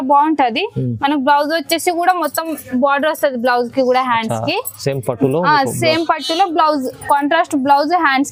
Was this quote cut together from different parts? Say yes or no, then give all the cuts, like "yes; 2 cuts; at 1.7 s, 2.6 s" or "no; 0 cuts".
no; 0 cuts